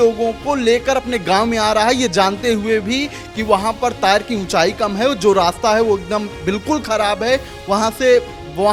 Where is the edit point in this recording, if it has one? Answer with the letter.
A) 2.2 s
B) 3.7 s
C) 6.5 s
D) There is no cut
D